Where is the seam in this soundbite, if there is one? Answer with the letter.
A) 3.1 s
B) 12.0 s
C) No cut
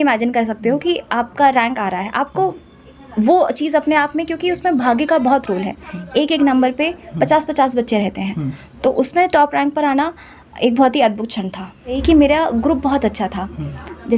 B